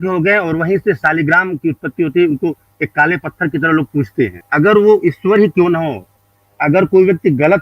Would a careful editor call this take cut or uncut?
cut